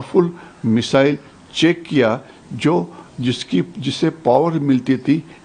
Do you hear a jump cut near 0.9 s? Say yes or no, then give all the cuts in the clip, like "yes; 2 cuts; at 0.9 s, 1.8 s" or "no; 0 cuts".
no; 0 cuts